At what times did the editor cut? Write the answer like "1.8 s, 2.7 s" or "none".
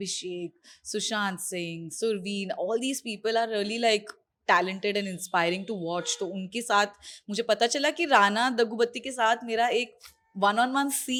none